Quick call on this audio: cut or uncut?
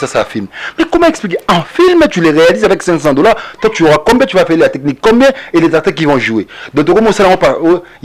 uncut